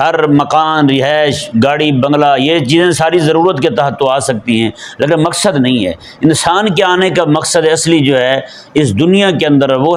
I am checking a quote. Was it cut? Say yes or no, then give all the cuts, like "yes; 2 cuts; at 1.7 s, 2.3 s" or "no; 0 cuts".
no; 0 cuts